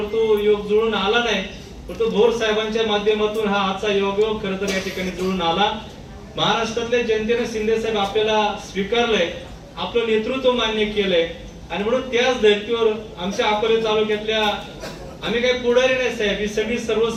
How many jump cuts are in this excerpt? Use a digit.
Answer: 0